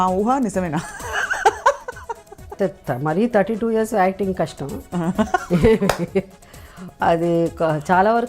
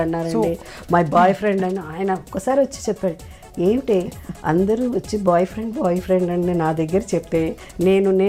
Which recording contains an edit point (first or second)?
first